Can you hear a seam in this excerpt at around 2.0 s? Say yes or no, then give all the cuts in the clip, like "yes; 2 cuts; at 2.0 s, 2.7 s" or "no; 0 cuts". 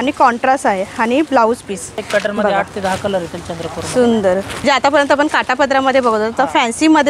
yes; 2 cuts; at 2.0 s, 4.6 s